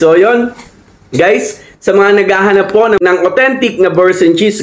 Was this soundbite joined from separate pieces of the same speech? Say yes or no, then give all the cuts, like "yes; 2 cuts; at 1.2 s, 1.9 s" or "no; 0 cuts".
yes; 1 cut; at 3.0 s